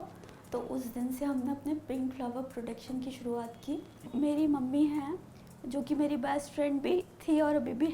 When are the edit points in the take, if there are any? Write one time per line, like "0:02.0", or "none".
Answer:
0:04.0